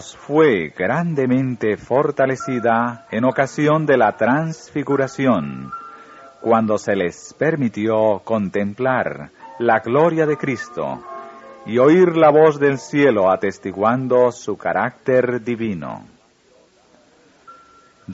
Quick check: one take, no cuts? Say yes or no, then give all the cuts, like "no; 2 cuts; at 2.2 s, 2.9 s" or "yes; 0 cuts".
no; 1 cut; at 3.8 s